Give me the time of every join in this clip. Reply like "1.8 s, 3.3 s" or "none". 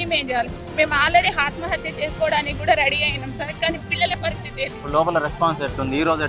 none